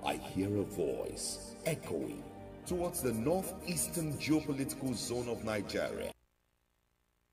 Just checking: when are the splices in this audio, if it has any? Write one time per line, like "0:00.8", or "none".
0:06.1